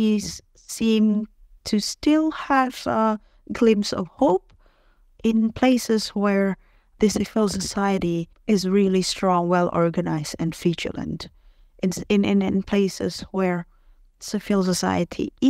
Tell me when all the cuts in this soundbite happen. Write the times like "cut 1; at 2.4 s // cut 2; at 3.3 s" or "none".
none